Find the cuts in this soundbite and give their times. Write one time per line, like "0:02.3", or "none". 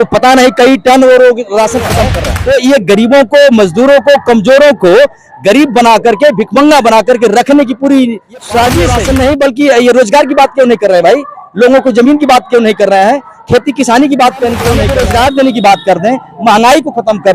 0:02.2
0:09.0
0:14.8

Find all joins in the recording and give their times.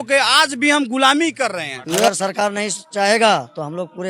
0:01.8

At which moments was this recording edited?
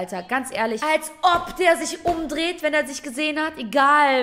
none

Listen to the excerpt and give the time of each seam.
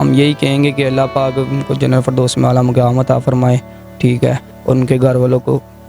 none

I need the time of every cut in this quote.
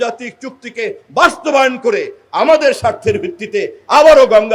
none

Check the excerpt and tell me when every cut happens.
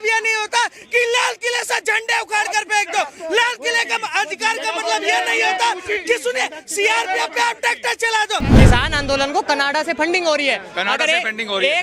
0:08.5

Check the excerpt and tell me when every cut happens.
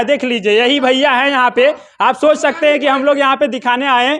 none

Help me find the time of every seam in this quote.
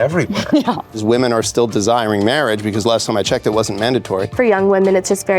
0:01.0
0:04.3

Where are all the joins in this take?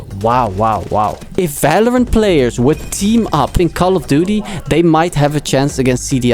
0:01.2
0:03.6

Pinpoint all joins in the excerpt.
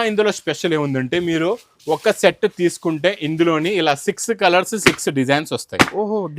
none

